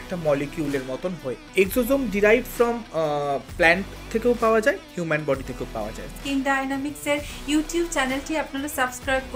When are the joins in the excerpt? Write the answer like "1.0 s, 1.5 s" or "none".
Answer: 1.4 s, 6.1 s

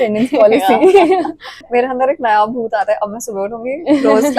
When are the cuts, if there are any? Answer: 1.5 s

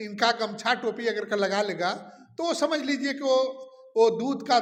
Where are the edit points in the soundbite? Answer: none

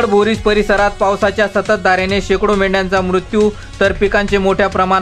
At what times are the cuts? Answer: none

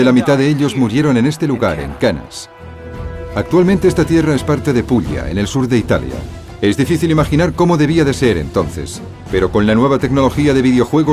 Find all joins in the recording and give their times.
none

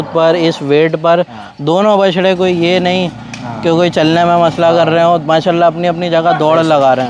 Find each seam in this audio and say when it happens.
none

